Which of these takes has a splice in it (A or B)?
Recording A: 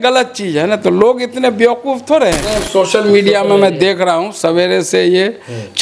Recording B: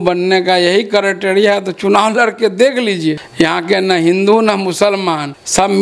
A